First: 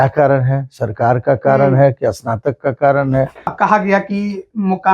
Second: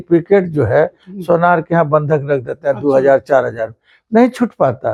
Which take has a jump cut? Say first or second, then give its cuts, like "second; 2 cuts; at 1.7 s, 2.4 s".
first; 1 cut; at 3.5 s